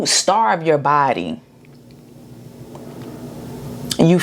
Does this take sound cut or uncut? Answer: uncut